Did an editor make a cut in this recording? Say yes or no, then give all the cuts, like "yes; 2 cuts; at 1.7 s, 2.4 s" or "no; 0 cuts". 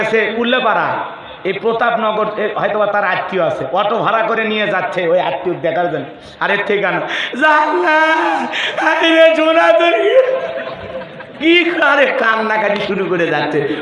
no; 0 cuts